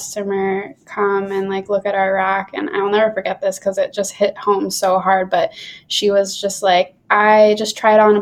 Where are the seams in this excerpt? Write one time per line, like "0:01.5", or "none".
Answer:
none